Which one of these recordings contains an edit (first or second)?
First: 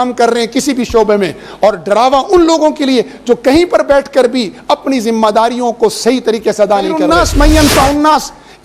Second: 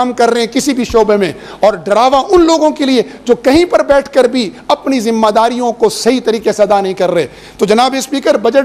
first